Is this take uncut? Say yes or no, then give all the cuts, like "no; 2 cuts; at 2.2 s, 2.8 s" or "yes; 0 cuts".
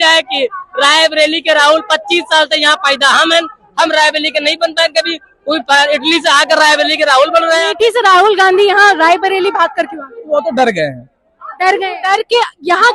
no; 2 cuts; at 7.7 s, 11.9 s